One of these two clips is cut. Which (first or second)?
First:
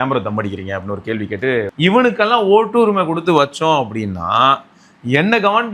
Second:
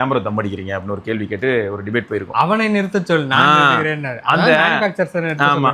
first